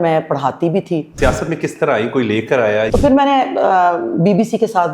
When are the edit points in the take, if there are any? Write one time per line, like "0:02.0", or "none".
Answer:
0:01.1
0:02.9